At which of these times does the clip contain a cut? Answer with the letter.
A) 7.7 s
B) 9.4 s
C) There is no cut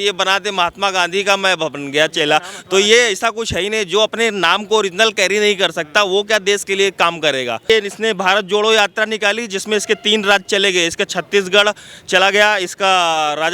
A